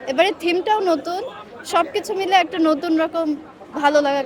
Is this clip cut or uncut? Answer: uncut